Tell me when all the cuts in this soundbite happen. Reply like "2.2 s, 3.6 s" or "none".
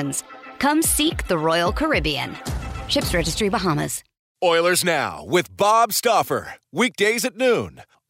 4.2 s